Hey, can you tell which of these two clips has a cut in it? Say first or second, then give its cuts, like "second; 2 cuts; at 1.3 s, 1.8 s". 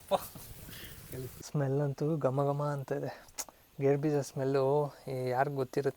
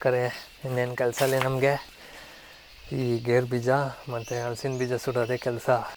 first; 1 cut; at 1.4 s